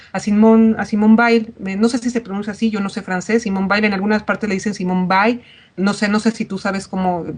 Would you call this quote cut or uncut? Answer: cut